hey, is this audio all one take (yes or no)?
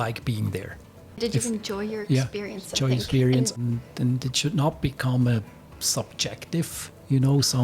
no